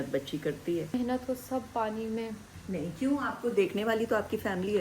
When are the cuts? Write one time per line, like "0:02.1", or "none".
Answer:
0:00.9
0:02.5